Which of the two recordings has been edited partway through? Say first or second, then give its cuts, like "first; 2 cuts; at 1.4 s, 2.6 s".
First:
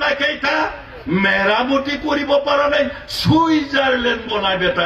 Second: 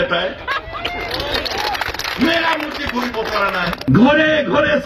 second; 1 cut; at 3.9 s